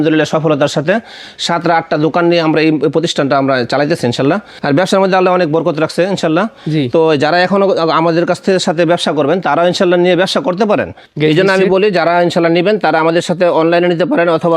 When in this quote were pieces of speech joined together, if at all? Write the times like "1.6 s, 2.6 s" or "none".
4.6 s, 10.9 s